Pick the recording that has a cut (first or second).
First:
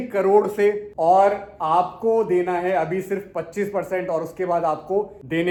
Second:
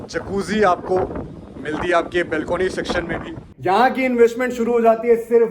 second